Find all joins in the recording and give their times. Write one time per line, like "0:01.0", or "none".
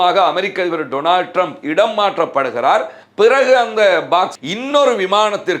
0:04.4